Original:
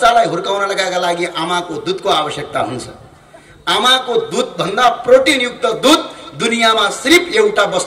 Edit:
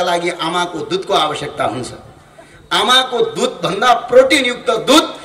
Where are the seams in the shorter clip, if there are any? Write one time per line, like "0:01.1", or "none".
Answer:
none

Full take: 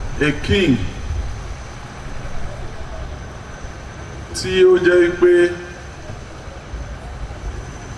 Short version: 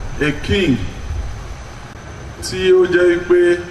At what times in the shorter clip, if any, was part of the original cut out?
0:01.9

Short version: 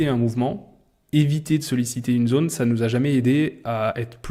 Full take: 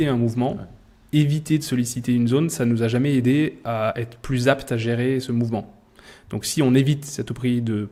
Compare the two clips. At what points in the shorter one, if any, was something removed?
none

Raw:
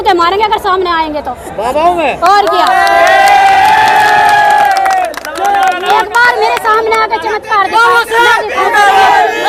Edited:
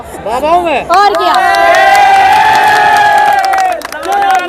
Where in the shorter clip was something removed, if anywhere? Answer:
none

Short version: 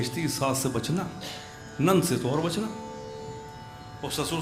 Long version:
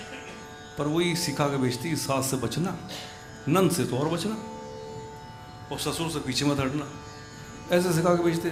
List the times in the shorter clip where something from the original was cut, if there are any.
none

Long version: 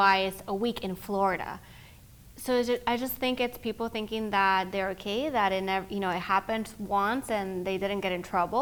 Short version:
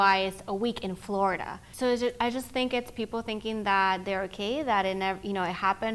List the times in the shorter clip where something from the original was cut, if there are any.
0:01.6

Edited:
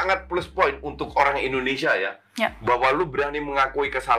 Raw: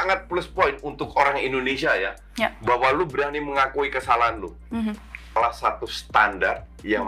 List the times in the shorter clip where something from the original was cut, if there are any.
none

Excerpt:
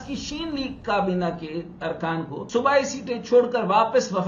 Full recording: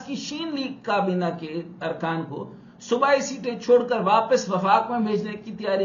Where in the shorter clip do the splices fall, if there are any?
0:02.4

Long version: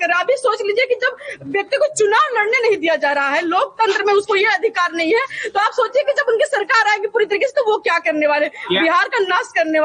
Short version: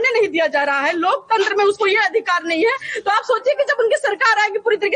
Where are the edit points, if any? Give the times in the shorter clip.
none

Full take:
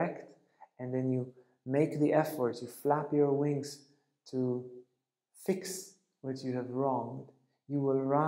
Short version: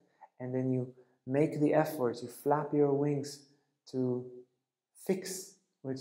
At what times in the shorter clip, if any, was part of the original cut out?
none

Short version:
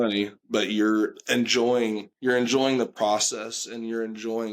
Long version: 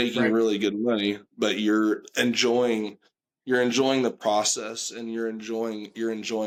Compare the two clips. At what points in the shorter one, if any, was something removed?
0:02.1

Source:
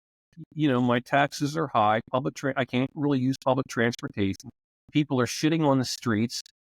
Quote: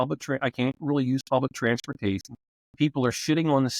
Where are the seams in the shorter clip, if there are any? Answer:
none

